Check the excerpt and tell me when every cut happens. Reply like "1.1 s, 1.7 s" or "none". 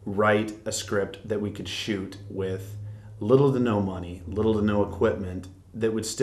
none

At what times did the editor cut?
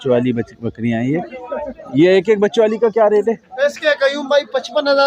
none

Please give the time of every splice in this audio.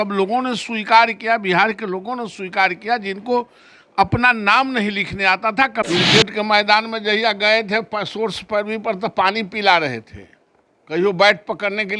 5.8 s

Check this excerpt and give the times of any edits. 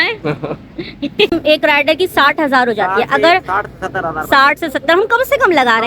1.3 s

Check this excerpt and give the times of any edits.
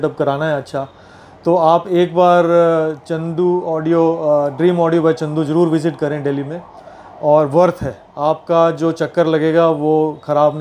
none

